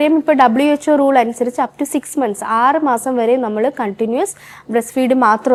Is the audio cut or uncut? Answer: uncut